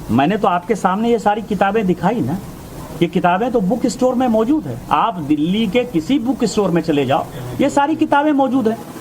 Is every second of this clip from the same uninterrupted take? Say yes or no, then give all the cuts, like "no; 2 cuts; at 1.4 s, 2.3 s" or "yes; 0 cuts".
no; 1 cut; at 7.7 s